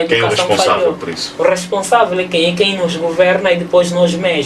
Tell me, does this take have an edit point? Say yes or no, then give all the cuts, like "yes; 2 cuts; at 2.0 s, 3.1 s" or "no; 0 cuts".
no; 0 cuts